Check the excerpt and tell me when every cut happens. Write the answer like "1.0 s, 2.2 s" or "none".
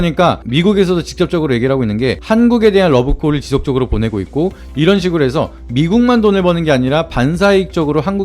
4.6 s